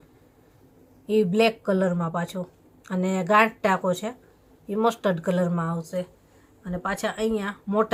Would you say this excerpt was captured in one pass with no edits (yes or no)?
yes